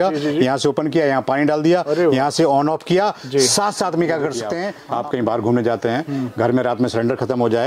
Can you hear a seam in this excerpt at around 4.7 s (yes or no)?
yes